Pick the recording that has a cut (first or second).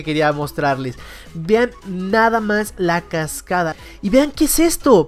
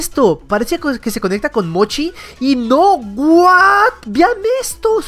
first